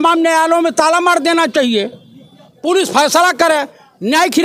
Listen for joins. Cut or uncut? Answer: uncut